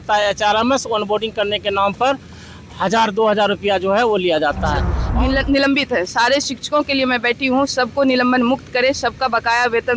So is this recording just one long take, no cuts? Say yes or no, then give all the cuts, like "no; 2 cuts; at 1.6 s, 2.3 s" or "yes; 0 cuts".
no; 1 cut; at 5.0 s